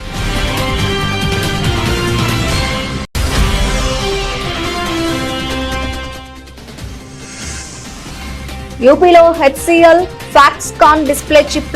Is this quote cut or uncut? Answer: cut